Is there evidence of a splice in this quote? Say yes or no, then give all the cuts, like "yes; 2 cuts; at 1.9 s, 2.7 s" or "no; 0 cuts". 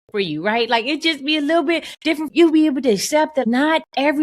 yes; 2 cuts; at 2.3 s, 3.4 s